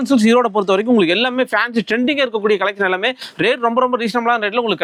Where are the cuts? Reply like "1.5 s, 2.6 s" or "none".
none